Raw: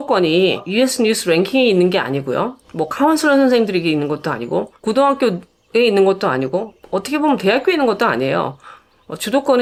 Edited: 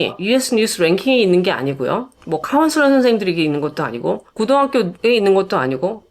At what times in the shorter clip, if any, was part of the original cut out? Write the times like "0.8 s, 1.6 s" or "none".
4.9 s